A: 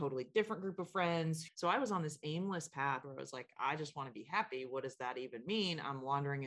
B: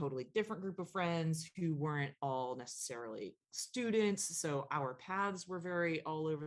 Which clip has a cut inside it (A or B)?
A